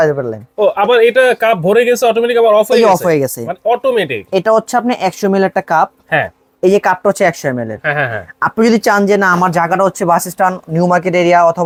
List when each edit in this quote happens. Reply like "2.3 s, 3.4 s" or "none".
none

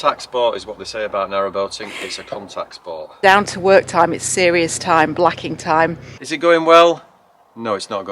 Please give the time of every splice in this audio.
3.1 s, 6.2 s

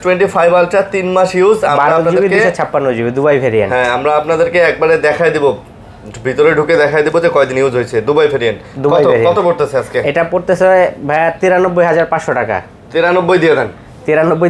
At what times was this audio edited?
none

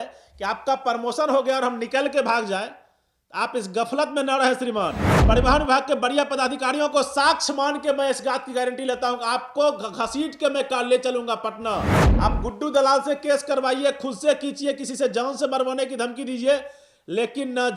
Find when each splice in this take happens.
5.1 s, 12.0 s

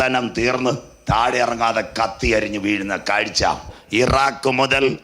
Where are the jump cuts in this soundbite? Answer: 3.8 s

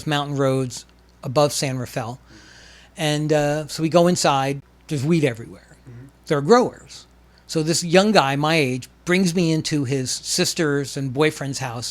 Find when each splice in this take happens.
4.7 s

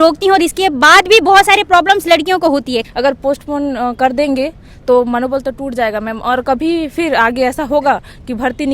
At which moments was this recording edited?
2.9 s

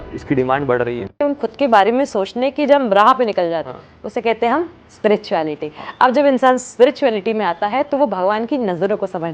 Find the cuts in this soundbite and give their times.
1.2 s

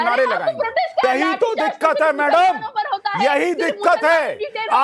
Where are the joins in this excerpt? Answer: 1.0 s

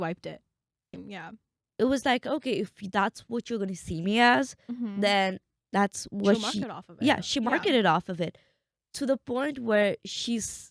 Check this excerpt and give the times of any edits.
1.1 s

